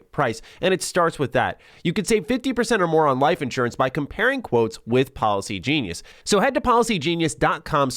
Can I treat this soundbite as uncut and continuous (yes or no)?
no